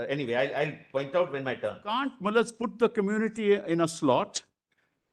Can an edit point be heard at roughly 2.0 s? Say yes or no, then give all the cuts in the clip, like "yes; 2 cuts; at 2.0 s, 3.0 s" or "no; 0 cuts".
yes; 1 cut; at 2.0 s